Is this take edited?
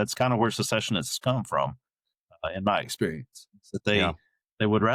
no; 0 cuts

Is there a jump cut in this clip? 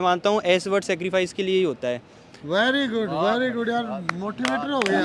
no; 0 cuts

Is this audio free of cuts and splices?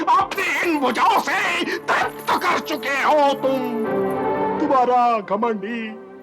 no; 1 cut; at 4.6 s

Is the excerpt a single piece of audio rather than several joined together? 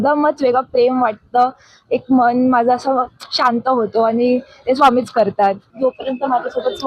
no; 1 cut; at 5.7 s

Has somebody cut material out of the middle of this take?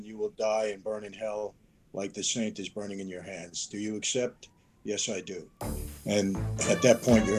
no; 0 cuts

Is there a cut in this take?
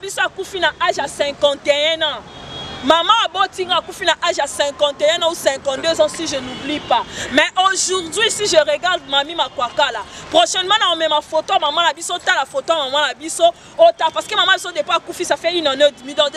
no; 0 cuts

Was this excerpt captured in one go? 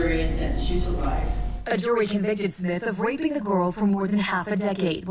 no; 1 cut; at 1.8 s

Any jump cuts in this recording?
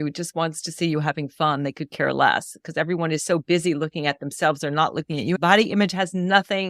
yes; 1 cut; at 5.4 s

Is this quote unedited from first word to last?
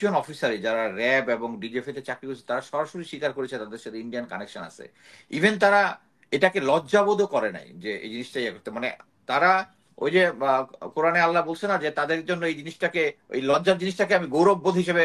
yes; 0 cuts

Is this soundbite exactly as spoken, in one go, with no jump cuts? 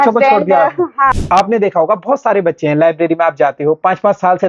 no; 1 cut; at 1.0 s

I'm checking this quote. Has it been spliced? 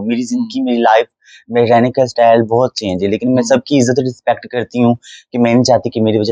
no; 0 cuts

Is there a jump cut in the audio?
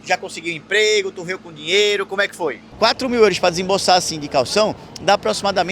yes; 1 cut; at 2.7 s

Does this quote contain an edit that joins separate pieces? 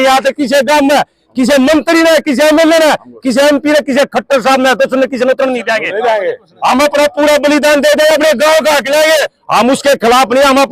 yes; 1 cut; at 9.4 s

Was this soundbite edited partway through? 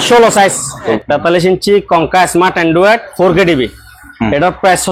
yes; 1 cut; at 1.0 s

